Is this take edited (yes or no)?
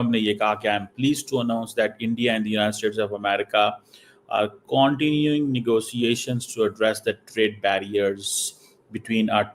no